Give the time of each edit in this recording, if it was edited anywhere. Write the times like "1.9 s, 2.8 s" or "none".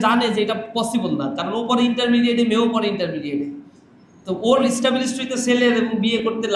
none